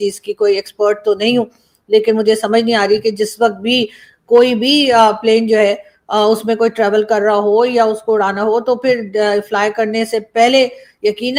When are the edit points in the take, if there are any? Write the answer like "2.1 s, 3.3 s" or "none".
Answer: none

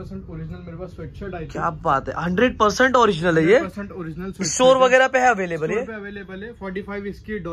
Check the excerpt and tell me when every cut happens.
none

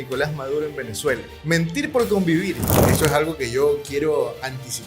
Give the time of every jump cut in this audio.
1.3 s, 2.8 s

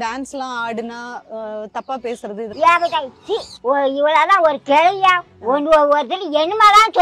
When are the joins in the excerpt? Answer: 2.5 s

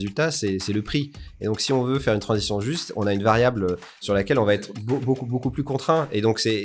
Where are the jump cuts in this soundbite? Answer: 4.0 s

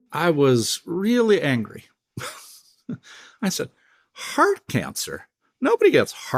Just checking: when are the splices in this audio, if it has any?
none

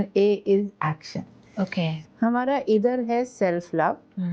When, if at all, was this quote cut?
2.0 s

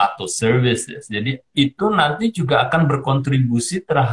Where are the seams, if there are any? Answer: 1.5 s

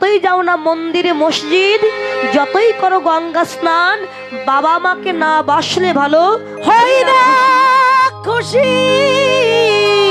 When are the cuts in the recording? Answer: none

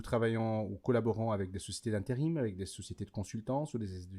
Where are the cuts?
none

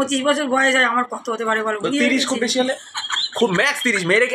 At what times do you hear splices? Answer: none

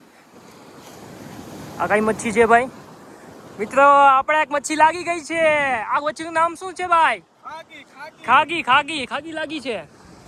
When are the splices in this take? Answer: none

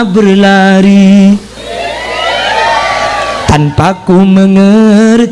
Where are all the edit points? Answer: 1.6 s

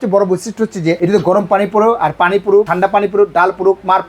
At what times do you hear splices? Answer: 1.0 s, 2.7 s

